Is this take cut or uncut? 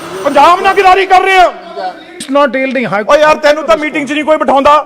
cut